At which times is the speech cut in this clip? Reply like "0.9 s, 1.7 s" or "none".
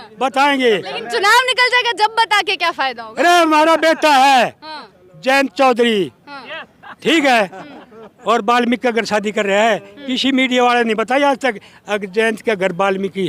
none